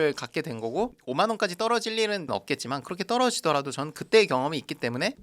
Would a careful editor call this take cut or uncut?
cut